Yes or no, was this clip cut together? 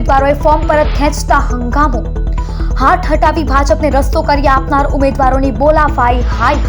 no